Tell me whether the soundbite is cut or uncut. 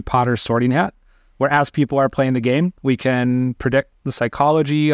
uncut